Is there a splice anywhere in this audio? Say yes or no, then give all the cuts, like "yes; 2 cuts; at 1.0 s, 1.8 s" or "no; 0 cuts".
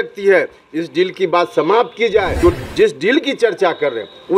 yes; 1 cut; at 2.3 s